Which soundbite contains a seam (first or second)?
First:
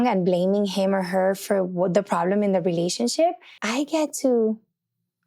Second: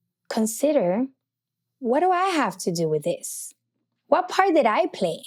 first